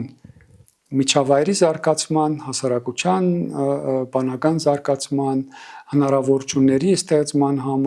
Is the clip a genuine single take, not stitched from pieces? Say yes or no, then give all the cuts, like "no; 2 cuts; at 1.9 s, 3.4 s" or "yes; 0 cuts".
yes; 0 cuts